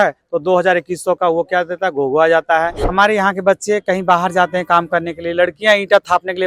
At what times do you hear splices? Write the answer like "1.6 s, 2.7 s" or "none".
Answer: 2.8 s